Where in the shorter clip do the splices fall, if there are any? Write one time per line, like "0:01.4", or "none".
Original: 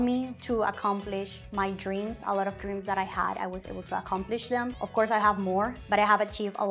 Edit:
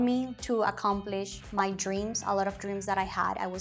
none